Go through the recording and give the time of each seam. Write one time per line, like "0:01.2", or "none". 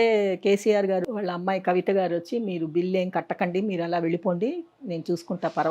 0:01.0